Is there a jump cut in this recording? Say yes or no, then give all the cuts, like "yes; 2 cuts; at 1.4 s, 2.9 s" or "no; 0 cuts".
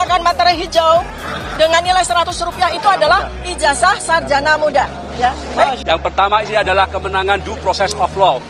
no; 0 cuts